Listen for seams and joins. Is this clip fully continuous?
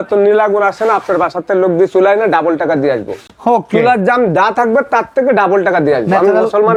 yes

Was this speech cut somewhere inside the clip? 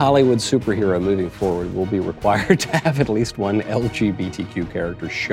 no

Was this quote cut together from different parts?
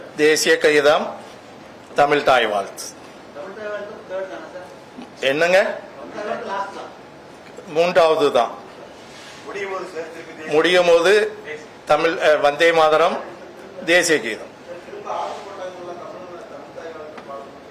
no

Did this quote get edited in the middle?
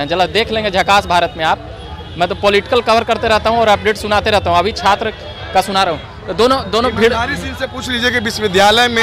no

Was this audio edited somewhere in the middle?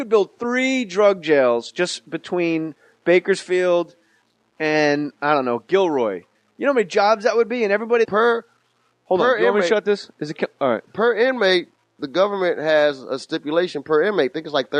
no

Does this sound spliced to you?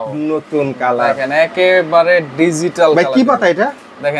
no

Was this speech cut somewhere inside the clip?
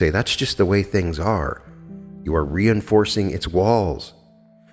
no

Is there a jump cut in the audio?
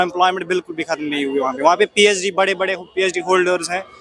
no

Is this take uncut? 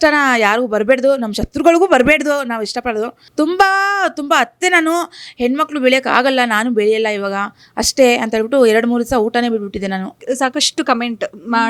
no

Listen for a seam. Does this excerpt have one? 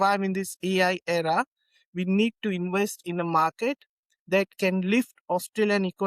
no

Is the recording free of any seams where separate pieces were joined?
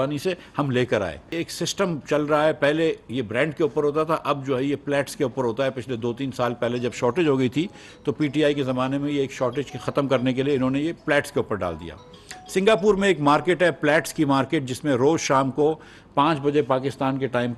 no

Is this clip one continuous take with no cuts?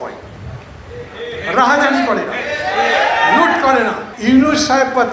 no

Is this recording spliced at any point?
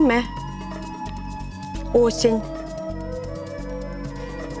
no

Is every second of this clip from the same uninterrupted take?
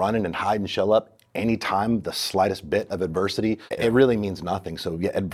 no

